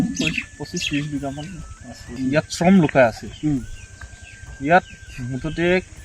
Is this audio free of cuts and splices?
no; 1 cut; at 2.1 s

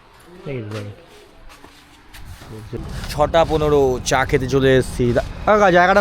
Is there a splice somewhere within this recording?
yes; 1 cut; at 2.9 s

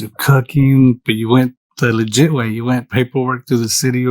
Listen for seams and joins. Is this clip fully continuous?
yes; 0 cuts

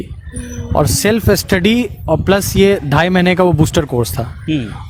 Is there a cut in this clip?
no; 0 cuts

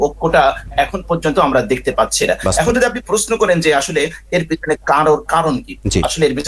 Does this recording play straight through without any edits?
yes; 0 cuts

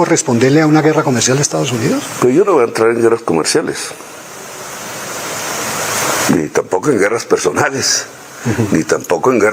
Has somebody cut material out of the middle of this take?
no; 0 cuts

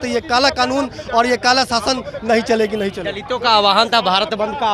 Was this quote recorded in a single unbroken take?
yes; 0 cuts

